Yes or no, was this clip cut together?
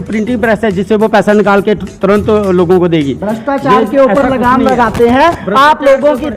no